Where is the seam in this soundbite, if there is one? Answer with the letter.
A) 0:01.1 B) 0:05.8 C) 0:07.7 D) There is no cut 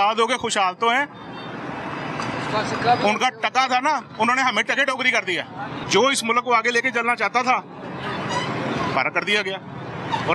B